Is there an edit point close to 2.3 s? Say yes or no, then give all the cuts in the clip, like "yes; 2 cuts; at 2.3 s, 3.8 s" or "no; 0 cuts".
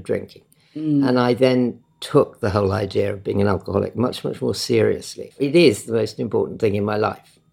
no; 1 cut; at 5.3 s